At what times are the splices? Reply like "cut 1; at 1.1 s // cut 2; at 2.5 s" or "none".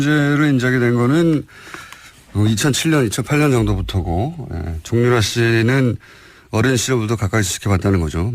cut 1; at 6.6 s